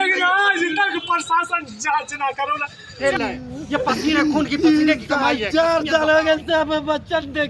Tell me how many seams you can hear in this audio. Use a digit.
1